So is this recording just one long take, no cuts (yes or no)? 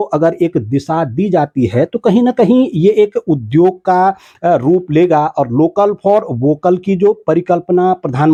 yes